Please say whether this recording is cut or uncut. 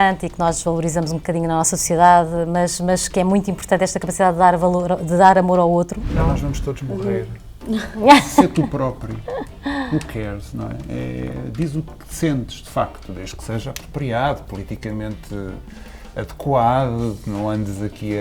cut